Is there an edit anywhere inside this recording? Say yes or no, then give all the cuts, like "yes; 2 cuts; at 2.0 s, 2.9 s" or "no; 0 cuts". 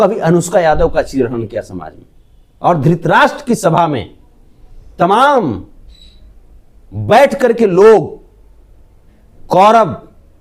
no; 0 cuts